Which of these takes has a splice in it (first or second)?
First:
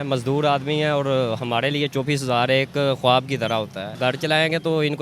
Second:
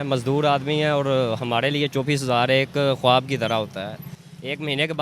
first